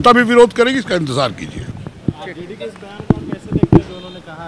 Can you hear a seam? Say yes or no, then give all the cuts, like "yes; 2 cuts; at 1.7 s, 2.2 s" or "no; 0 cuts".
no; 0 cuts